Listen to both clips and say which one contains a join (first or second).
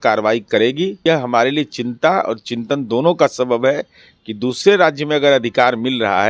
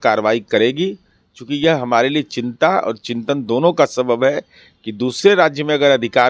first